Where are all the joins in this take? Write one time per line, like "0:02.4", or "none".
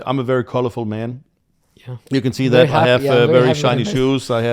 none